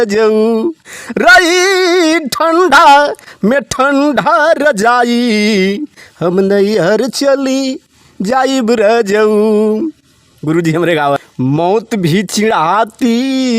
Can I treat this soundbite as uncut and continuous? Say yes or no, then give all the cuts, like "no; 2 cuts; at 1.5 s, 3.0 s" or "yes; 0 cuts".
no; 1 cut; at 11.2 s